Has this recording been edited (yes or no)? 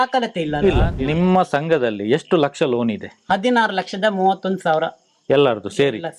yes